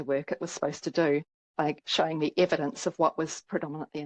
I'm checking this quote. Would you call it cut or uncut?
uncut